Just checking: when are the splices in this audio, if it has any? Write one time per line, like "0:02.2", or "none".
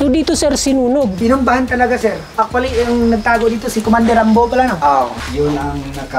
0:01.1
0:02.2
0:05.2